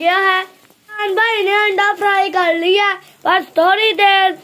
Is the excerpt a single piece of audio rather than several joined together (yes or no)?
no